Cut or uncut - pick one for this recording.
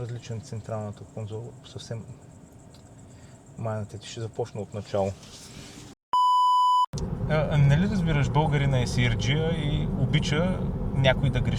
uncut